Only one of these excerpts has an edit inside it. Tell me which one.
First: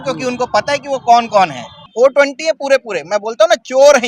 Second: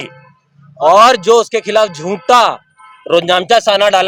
first; 1 cut; at 1.8 s

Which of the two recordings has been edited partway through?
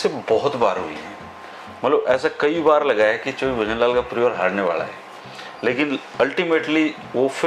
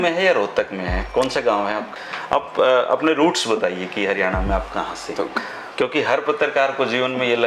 second; 2 cuts; at 1.9 s, 5.3 s

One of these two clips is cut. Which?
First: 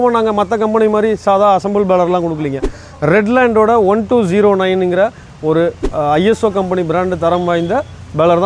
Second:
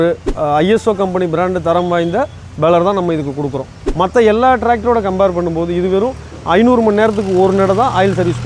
second; 1 cut; at 3.9 s

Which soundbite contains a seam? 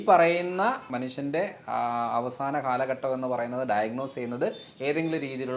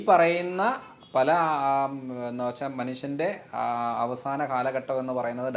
first; 1 cut; at 0.9 s

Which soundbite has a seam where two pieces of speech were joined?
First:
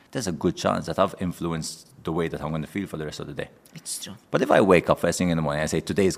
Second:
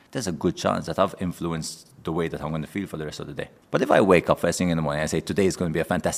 second; 1 cut; at 3.6 s

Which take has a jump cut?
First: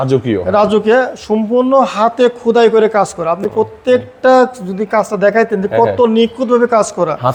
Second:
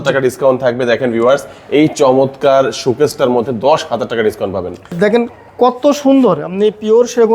second; 1 cut; at 4.9 s

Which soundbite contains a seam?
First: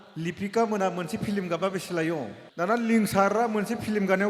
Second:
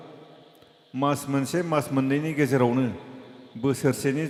first; 1 cut; at 2.4 s

